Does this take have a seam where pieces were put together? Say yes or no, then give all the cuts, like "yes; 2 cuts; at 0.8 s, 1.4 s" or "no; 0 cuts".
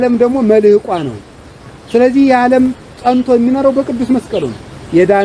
no; 0 cuts